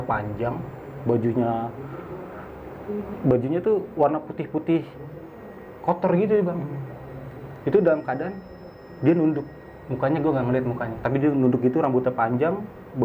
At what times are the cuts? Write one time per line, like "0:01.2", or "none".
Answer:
none